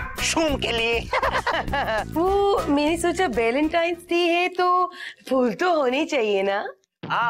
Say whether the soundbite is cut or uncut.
cut